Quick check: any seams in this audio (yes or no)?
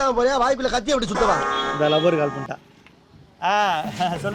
no